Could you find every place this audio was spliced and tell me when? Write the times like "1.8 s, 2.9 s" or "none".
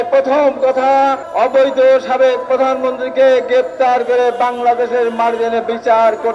1.2 s